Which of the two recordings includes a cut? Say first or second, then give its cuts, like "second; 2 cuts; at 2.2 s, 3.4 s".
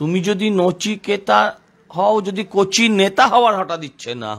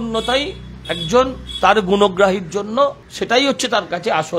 second; 1 cut; at 3.1 s